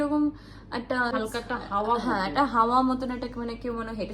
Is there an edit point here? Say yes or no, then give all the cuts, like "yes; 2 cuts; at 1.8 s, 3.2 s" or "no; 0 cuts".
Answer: yes; 1 cut; at 1.1 s